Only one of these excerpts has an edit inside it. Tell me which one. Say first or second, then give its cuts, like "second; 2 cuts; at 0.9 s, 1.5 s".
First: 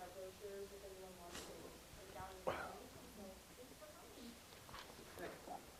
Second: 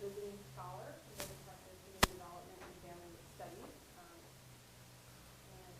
second; 1 cut; at 3.8 s